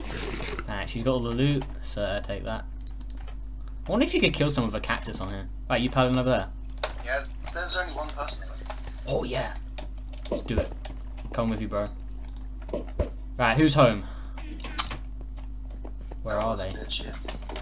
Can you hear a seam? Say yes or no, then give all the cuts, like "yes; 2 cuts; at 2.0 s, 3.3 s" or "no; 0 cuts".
yes; 1 cut; at 13.5 s